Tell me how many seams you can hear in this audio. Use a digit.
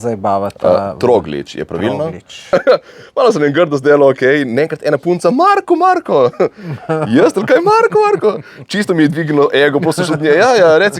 1